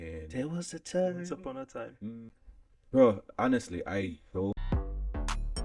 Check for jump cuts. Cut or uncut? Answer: cut